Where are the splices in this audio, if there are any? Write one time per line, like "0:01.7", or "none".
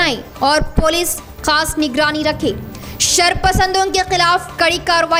none